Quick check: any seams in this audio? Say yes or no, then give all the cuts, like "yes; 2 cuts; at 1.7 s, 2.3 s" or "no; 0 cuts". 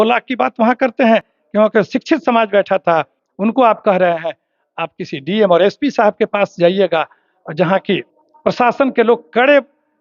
no; 0 cuts